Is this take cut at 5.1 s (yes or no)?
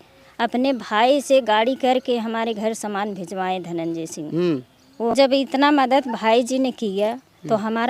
yes